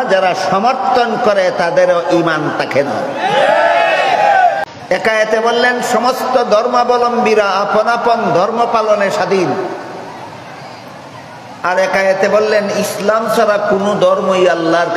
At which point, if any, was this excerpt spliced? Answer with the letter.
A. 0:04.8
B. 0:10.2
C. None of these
A